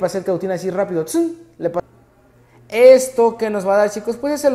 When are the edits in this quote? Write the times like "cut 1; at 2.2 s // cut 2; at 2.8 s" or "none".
cut 1; at 1.8 s